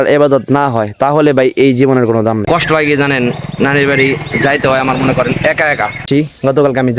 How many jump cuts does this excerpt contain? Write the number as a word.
two